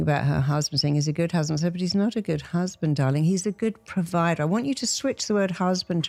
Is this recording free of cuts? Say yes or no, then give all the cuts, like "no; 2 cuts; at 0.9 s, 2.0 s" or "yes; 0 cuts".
yes; 0 cuts